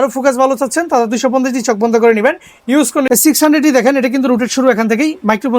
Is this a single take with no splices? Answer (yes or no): no